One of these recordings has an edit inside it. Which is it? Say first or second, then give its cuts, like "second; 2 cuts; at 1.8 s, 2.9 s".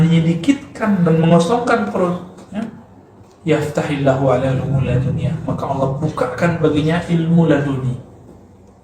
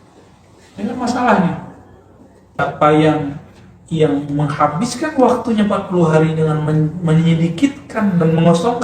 second; 1 cut; at 2.7 s